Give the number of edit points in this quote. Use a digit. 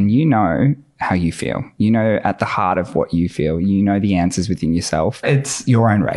1